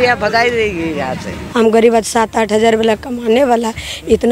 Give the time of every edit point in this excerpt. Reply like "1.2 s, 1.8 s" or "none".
1.4 s